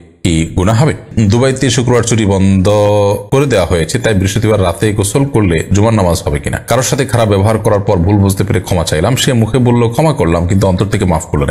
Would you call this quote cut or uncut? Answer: cut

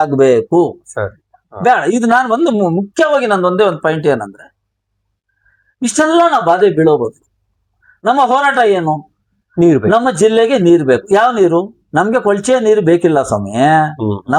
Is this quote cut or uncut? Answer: uncut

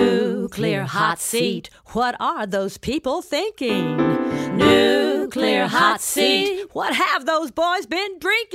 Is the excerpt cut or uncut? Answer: uncut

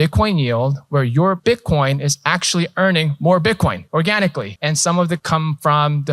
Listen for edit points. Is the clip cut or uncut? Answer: cut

